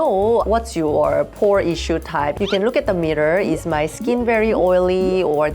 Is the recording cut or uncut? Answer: cut